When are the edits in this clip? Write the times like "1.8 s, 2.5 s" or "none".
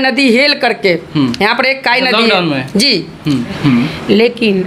3.6 s